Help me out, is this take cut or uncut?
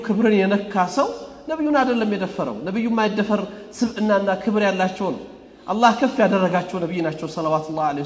uncut